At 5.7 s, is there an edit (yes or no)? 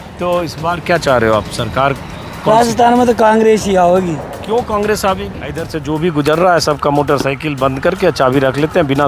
yes